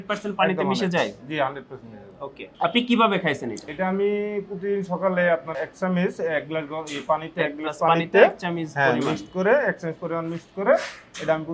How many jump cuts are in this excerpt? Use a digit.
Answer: 1